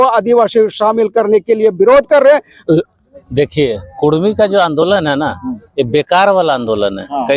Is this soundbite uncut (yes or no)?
no